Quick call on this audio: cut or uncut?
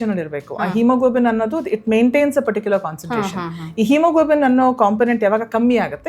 uncut